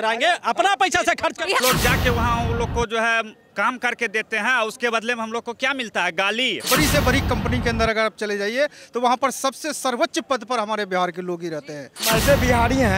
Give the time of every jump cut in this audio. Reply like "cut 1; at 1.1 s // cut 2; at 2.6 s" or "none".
cut 1; at 1.6 s // cut 2; at 6.7 s // cut 3; at 11.9 s